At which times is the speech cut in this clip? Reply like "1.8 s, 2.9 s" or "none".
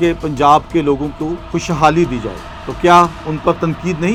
none

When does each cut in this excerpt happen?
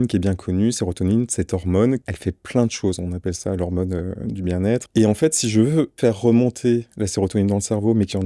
2.0 s, 4.9 s, 6.0 s

